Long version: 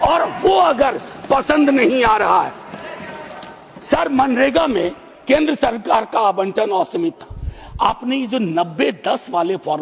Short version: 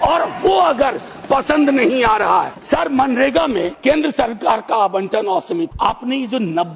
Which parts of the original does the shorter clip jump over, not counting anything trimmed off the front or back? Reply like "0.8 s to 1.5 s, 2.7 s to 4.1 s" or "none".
2.6 s to 3.8 s, 4.9 s to 5.2 s, 7.2 s to 7.7 s